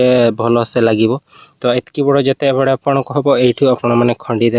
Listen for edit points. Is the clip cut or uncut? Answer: uncut